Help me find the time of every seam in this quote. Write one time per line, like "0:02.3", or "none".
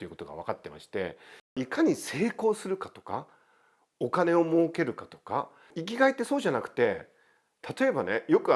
0:01.6
0:05.8